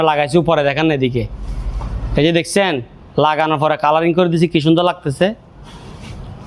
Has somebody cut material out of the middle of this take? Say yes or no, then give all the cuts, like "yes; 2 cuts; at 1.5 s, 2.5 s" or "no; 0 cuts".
no; 0 cuts